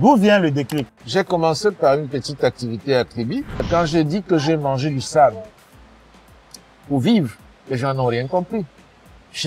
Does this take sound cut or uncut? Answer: cut